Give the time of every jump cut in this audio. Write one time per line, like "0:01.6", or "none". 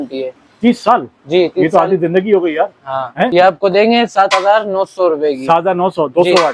0:03.3